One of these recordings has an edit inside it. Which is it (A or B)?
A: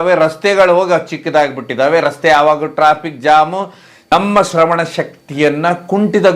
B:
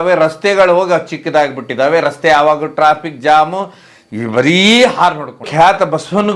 A